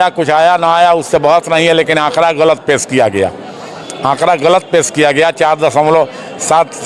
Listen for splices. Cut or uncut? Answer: uncut